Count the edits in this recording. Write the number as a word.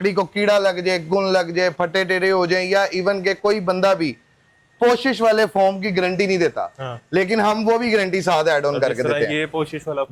zero